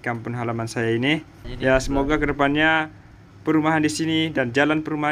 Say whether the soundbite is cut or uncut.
cut